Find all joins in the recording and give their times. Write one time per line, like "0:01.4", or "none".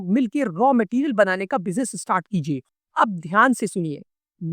0:02.7